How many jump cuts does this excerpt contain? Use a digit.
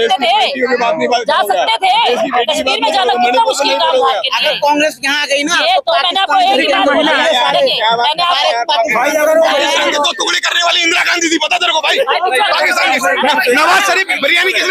0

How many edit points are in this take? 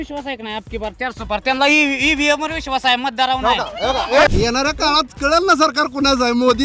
1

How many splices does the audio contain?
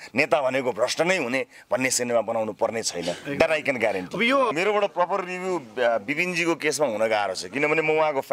1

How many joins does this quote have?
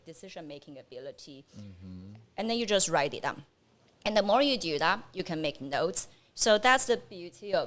0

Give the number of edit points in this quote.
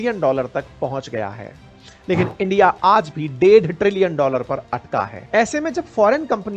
1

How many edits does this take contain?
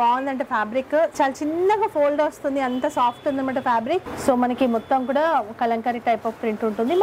2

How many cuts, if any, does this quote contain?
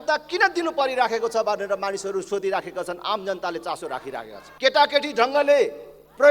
1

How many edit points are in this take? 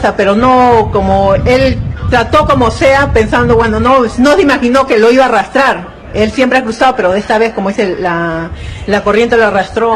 1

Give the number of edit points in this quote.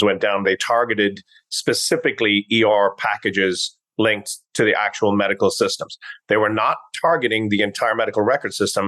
0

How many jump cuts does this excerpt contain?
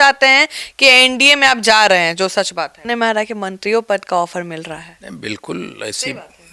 1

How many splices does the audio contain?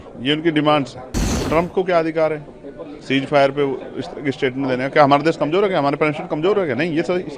1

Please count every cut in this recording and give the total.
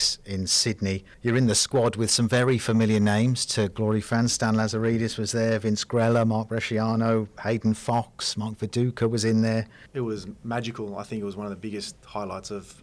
2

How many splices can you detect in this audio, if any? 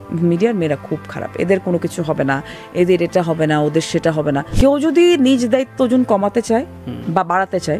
1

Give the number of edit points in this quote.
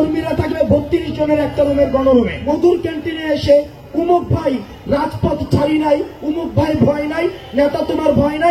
1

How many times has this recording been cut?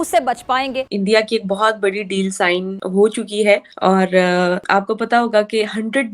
4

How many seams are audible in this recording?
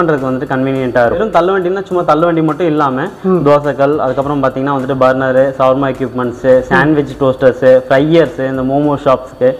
1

